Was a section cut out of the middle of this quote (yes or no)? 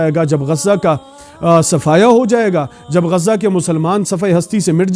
no